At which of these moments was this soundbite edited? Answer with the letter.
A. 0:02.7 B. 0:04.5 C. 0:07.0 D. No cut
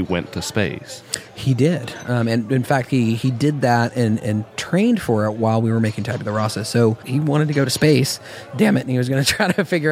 C